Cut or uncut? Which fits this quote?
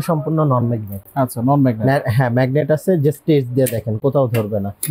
uncut